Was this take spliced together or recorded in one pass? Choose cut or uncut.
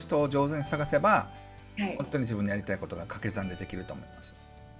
uncut